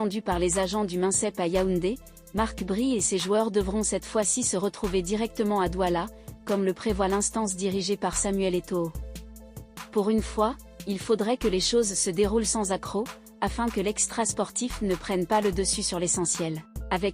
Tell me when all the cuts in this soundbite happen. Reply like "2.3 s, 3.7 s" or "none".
none